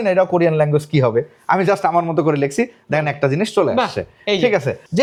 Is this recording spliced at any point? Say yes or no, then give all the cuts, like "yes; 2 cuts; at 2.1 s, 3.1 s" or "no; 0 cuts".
no; 0 cuts